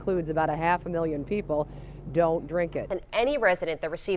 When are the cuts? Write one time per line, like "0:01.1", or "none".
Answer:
0:02.9